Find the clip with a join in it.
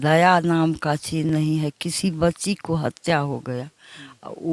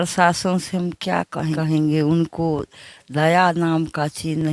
second; 1 cut; at 1.5 s

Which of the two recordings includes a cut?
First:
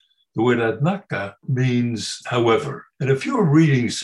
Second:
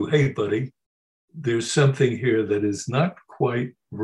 first; 3 cuts; at 1.4 s, 2.2 s, 2.8 s

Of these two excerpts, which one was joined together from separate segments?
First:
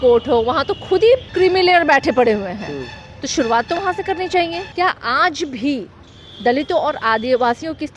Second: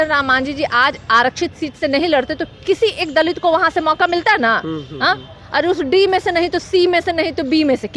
first; 2 cuts; at 1.3 s, 4.6 s

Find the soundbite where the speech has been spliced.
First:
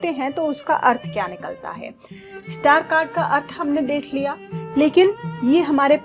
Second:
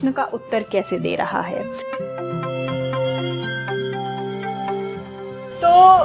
second; 1 cut; at 1.8 s

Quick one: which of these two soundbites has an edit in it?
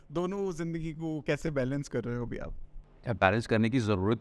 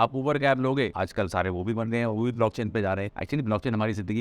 second; 2 cuts; at 0.9 s, 3.1 s

